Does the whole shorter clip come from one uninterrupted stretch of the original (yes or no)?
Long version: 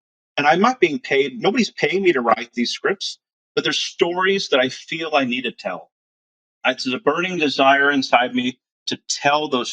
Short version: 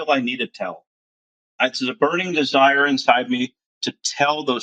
yes